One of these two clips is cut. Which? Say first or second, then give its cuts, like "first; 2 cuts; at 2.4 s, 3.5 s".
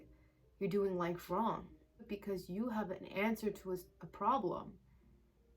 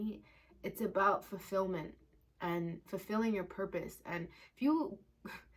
first; 1 cut; at 2.0 s